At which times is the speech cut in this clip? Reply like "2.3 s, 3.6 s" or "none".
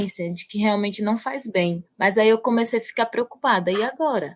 none